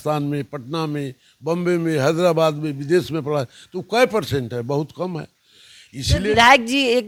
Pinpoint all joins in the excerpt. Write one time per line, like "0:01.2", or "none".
none